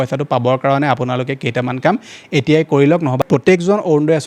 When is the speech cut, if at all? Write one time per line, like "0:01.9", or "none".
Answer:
0:03.2